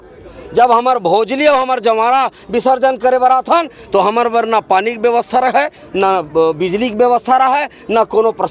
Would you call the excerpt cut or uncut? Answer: uncut